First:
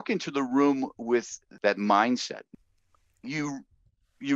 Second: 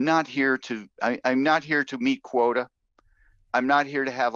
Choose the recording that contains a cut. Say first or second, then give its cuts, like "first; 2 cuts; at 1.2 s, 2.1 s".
first; 2 cuts; at 1.4 s, 2.4 s